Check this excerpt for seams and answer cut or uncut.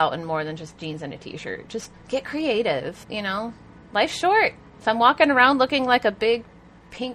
cut